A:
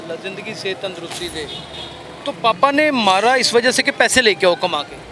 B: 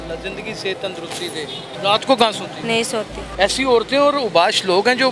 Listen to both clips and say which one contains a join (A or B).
B